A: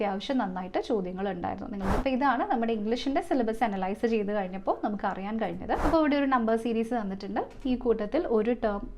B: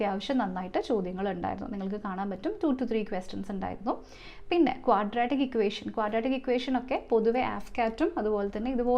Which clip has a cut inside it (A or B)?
A